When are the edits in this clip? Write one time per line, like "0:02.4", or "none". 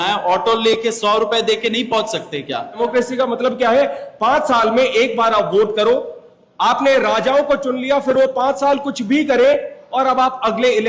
0:02.8